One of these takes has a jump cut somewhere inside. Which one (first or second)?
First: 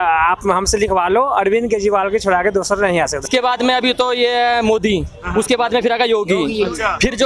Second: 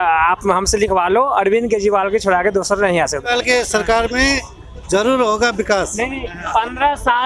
first